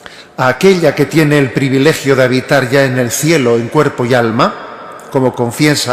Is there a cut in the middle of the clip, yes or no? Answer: yes